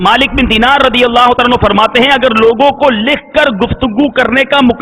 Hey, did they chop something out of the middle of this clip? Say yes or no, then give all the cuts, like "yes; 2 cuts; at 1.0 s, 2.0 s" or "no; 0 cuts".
no; 0 cuts